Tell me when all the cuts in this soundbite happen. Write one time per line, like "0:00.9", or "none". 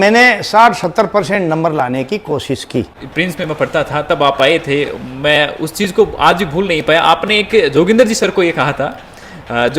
0:03.0